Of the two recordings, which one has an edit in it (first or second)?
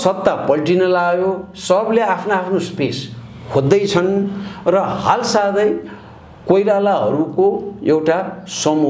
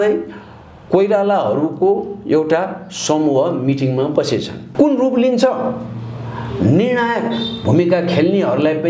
second